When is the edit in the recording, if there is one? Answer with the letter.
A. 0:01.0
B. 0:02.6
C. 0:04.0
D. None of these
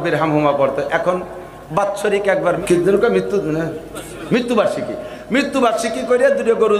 B